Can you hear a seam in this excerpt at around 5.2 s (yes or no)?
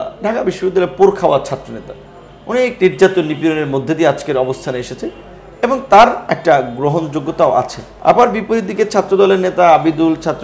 no